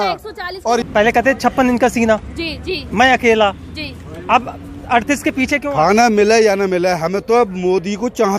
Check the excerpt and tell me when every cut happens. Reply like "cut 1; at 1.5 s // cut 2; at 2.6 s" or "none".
cut 1; at 0.8 s // cut 2; at 5.6 s

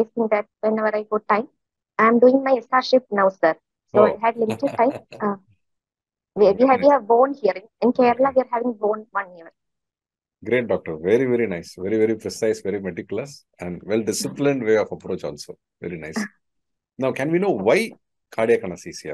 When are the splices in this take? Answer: none

